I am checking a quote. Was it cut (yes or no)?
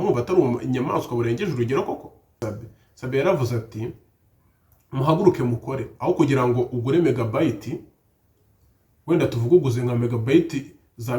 yes